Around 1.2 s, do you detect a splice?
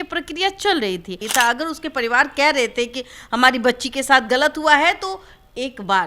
yes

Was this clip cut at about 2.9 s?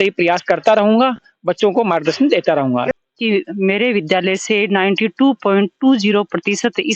yes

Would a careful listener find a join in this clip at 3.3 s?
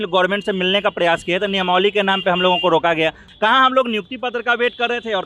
yes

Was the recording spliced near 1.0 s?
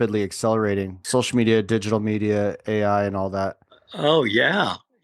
yes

